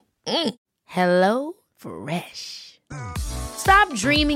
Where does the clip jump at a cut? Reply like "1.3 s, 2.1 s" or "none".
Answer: none